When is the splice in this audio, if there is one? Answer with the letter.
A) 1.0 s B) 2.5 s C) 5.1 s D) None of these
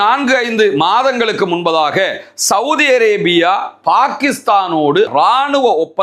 C